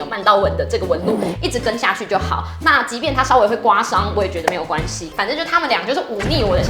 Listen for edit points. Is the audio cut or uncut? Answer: uncut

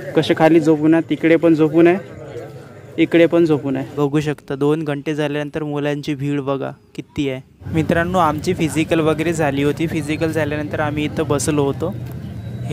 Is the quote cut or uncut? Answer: cut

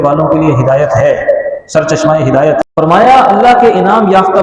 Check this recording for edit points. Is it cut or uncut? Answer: cut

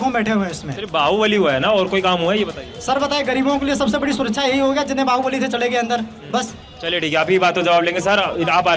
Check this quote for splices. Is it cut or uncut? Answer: uncut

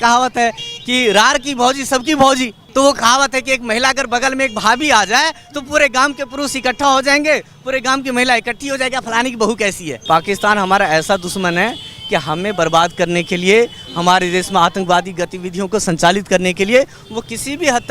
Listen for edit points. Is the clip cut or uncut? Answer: cut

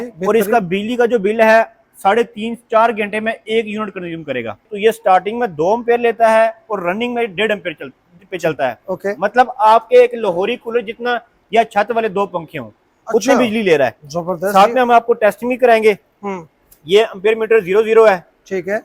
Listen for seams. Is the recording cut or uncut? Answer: cut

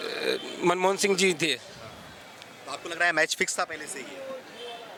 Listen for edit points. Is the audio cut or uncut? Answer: uncut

